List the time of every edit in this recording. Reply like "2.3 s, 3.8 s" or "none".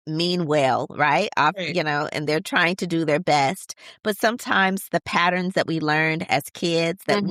none